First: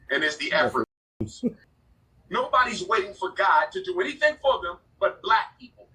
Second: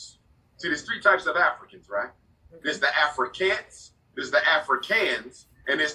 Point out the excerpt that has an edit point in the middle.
first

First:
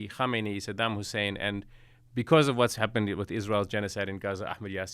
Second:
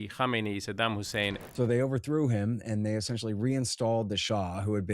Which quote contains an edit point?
second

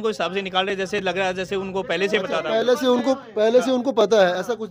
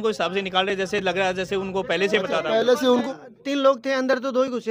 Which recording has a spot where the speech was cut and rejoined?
second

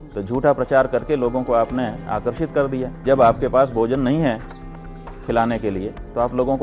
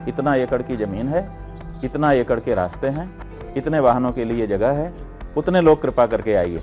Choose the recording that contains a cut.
first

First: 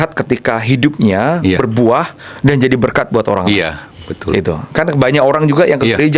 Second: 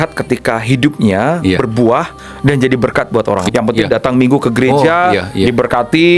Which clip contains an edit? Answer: second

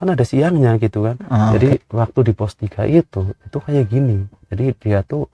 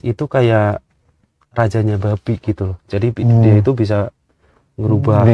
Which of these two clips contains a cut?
first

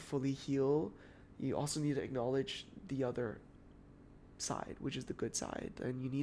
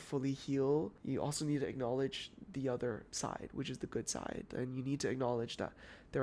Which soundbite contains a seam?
second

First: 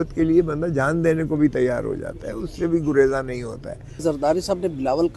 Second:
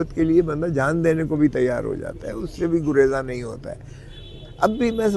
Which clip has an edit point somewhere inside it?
first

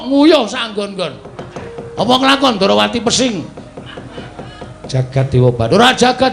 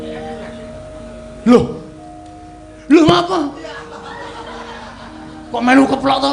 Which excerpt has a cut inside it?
first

